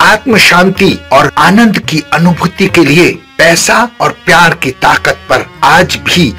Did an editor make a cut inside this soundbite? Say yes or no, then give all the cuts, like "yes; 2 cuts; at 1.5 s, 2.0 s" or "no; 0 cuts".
yes; 1 cut; at 1.3 s